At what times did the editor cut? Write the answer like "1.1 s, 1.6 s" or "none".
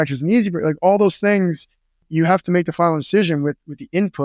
2.1 s